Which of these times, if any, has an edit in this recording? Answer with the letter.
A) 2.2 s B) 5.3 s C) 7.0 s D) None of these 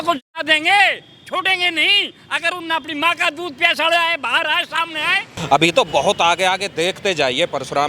B